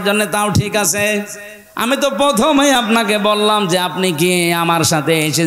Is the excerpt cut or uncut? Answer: uncut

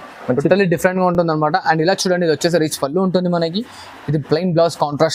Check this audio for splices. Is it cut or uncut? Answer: uncut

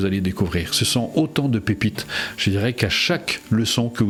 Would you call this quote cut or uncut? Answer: uncut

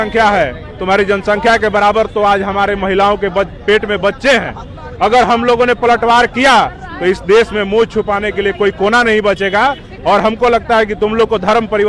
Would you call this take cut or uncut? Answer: uncut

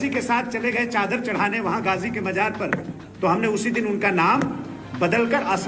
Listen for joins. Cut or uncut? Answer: cut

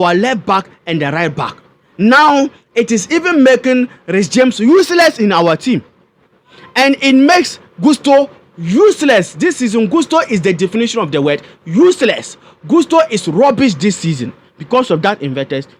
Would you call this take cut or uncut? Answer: uncut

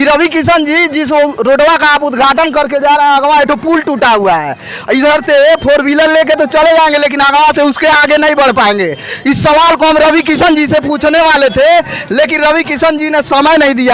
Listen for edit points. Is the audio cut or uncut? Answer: uncut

